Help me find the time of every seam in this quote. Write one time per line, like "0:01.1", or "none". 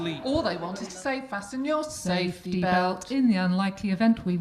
none